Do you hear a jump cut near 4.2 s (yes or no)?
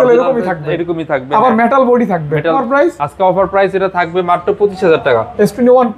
no